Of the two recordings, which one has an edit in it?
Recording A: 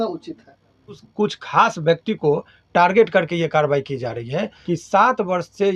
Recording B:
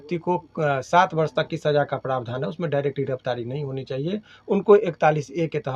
A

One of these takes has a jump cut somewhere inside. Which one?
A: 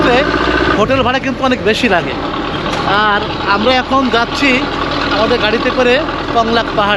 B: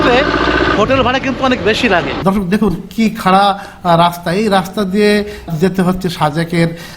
B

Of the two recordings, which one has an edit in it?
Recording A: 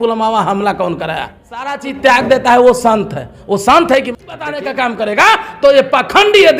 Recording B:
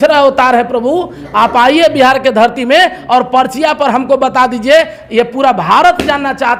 A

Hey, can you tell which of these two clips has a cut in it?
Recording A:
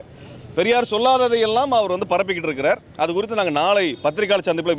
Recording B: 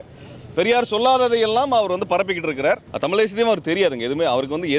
B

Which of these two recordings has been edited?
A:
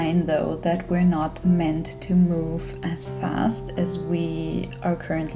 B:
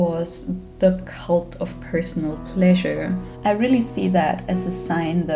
B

